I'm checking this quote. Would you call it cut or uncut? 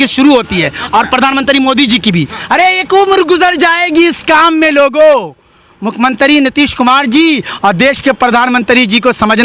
cut